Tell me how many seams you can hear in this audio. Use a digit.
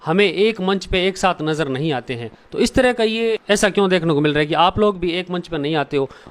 1